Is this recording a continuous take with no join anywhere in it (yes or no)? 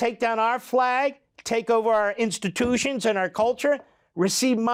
yes